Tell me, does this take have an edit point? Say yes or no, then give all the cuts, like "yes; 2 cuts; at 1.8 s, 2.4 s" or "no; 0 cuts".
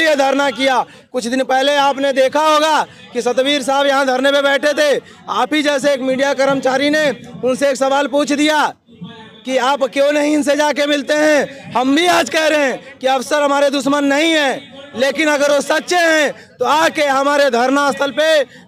no; 0 cuts